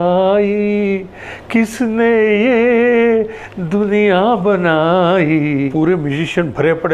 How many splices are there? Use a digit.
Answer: 1